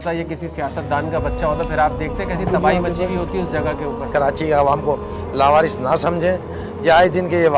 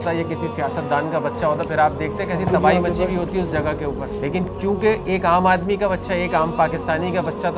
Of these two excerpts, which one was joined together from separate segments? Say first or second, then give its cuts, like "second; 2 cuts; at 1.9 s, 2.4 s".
first; 1 cut; at 4.1 s